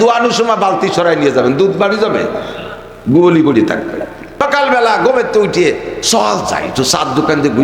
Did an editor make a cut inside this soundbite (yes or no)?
yes